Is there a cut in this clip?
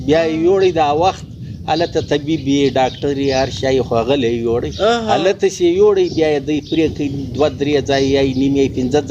no; 0 cuts

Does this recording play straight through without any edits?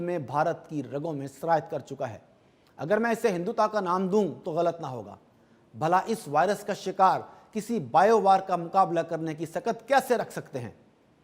yes; 0 cuts

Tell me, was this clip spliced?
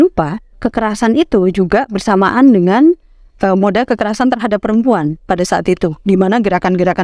no; 0 cuts

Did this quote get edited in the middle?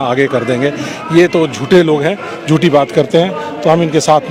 no; 0 cuts

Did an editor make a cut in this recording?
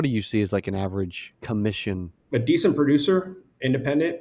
yes; 2 cuts; at 1.3 s, 2.1 s

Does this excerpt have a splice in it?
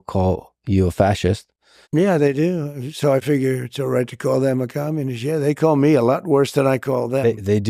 no; 0 cuts

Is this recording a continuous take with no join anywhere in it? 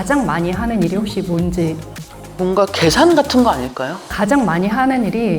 no; 1 cut; at 4.1 s

